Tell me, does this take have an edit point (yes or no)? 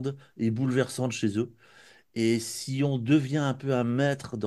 no